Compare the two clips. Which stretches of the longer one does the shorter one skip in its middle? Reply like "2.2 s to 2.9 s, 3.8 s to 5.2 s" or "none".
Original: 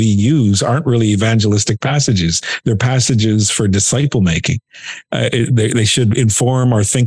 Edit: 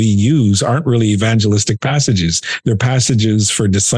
none